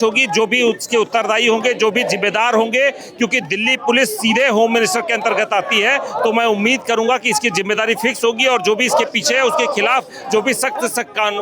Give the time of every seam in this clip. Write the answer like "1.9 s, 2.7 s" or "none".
none